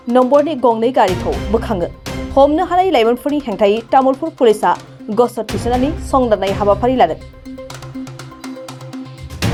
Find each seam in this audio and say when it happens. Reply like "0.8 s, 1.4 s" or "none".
none